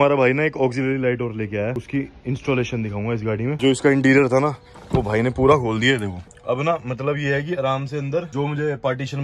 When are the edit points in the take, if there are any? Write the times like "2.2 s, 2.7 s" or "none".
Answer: 1.8 s, 3.6 s